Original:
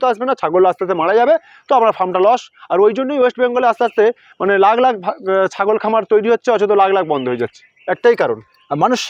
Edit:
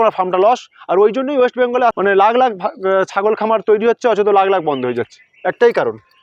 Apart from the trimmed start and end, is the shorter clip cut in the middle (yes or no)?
yes